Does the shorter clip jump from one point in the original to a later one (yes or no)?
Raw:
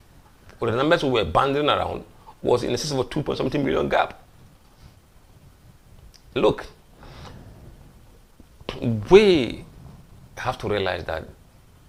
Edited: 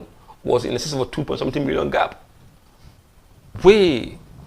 yes